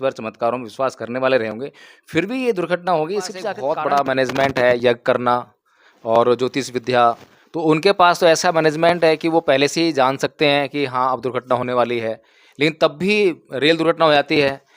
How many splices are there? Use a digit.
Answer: 1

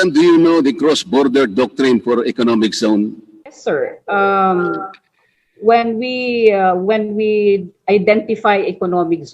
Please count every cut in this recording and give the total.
1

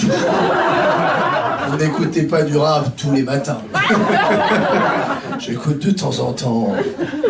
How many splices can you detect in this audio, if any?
0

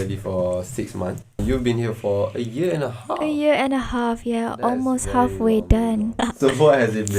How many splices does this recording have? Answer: 1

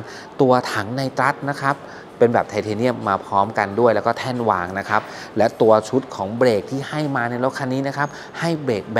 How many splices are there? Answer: 0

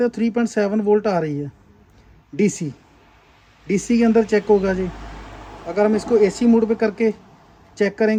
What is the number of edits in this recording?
0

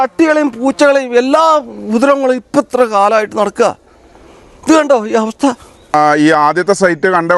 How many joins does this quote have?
1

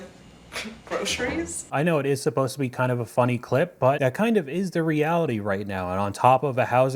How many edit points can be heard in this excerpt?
0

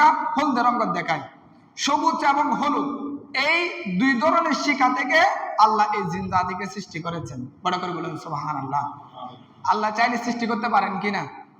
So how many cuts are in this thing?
0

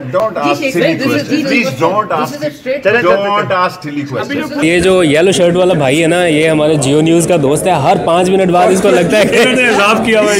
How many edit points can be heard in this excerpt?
1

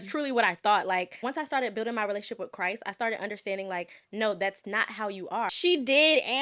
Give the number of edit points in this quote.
2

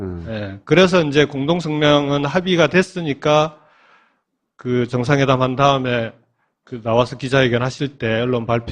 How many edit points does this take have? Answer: 1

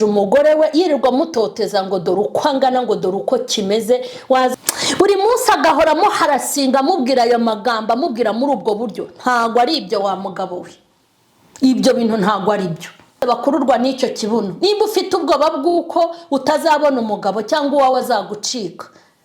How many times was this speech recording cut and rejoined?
2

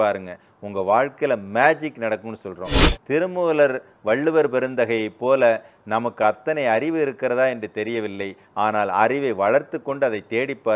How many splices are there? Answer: 0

